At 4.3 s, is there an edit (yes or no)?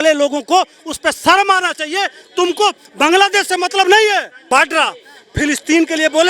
yes